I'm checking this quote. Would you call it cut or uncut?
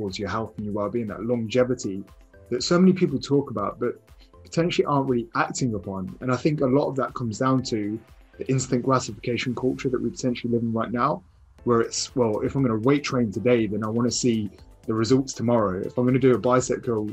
uncut